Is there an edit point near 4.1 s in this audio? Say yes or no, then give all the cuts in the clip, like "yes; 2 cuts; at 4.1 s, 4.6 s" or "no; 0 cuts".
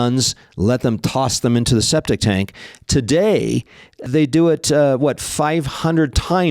yes; 1 cut; at 4.1 s